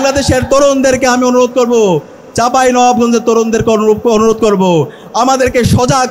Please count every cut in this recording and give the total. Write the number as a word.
zero